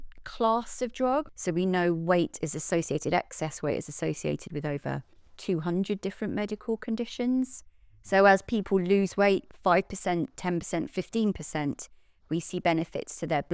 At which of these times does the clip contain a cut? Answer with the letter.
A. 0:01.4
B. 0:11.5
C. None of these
A